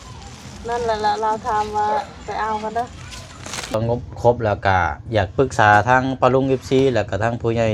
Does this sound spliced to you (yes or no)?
yes